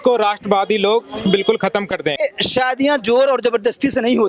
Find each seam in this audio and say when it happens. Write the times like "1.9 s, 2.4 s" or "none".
2.2 s